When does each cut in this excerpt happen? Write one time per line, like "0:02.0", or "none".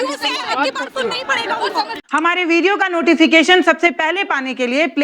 0:02.0